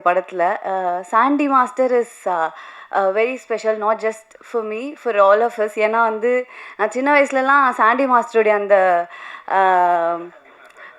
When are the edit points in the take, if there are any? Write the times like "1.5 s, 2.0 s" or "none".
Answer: none